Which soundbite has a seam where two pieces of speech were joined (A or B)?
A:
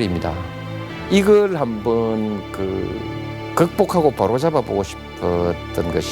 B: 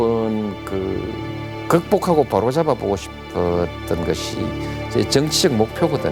A